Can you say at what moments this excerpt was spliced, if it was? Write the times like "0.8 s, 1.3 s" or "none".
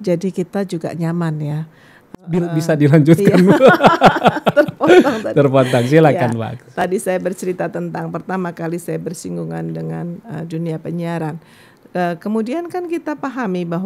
2.3 s